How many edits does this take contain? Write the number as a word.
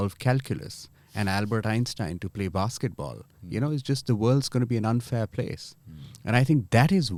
zero